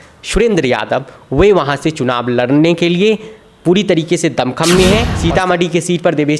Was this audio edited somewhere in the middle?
yes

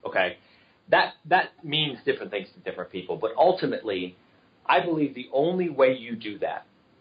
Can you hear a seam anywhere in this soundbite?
no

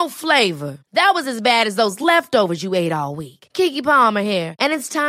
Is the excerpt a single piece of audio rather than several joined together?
yes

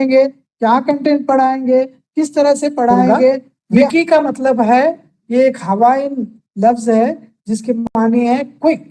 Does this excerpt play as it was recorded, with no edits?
no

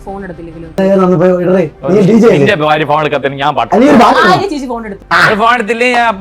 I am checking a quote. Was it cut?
yes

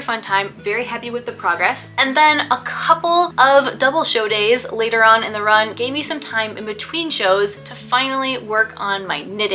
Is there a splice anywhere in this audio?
yes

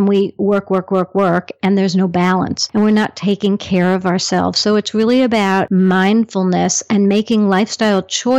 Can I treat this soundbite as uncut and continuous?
no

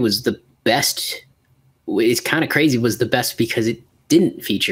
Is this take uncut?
yes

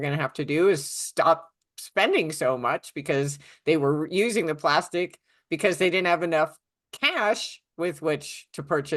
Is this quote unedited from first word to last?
yes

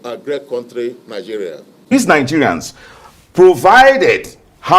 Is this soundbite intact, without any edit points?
no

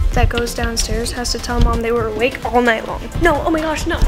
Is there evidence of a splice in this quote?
yes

